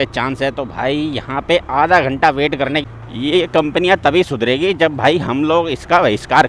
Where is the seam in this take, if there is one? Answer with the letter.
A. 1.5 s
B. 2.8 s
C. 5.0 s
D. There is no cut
B